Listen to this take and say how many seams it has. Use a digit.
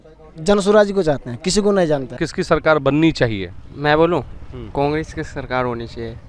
1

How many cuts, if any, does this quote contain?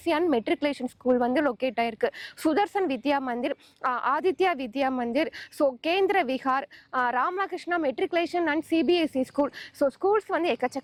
0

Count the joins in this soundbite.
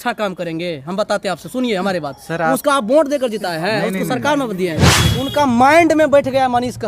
1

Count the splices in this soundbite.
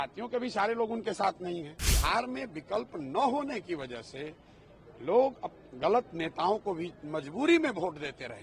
1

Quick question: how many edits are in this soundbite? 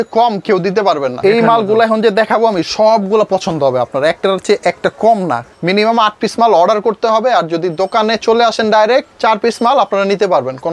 2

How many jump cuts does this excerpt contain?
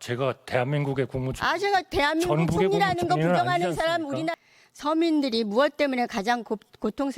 1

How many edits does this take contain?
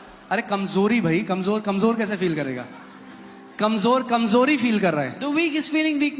0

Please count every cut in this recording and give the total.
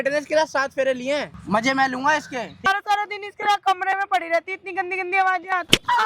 2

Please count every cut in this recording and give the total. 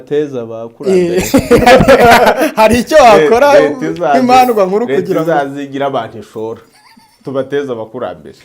0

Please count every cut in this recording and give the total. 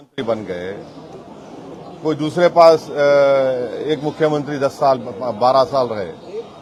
0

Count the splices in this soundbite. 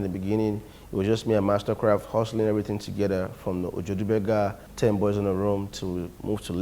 1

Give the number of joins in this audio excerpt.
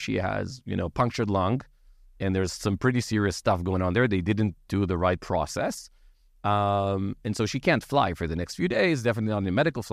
0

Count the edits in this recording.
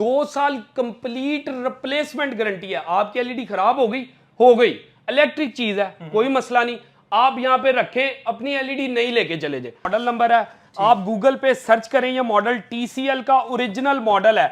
1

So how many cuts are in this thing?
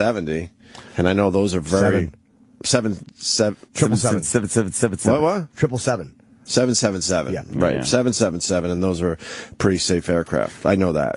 0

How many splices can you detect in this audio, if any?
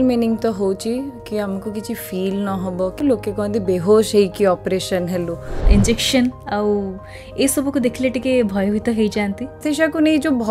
3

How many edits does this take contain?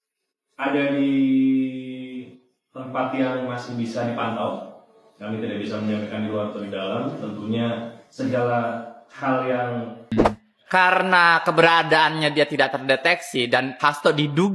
1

